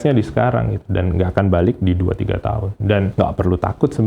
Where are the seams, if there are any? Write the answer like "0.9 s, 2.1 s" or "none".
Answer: 1.3 s, 3.0 s